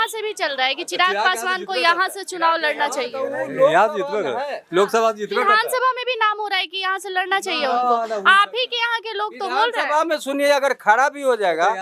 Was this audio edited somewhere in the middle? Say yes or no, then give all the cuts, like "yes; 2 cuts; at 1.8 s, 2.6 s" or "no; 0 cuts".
no; 0 cuts